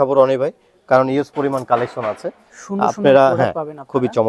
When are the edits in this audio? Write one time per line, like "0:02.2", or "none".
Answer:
none